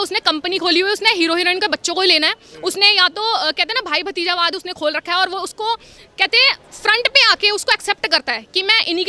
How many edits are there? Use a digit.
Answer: 0